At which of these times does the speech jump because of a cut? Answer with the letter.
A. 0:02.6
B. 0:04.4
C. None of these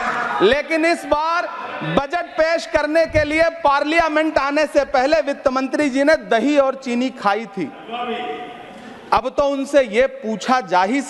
C